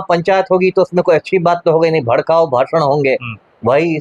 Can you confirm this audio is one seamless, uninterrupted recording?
yes; 0 cuts

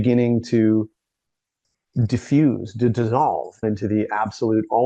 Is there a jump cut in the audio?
yes; 1 cut; at 3.6 s

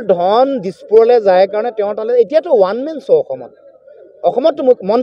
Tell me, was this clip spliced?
no; 0 cuts

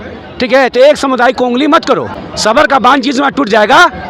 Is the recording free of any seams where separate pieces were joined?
no; 1 cut; at 2.3 s

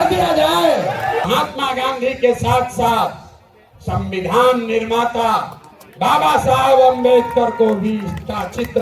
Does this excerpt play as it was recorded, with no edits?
no; 1 cut; at 1.2 s

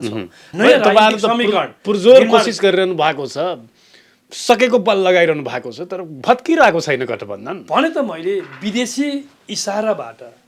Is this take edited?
no; 0 cuts

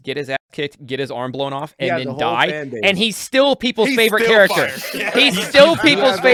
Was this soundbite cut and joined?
no; 0 cuts

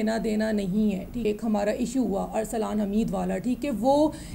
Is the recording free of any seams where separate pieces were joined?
no; 1 cut; at 1.2 s

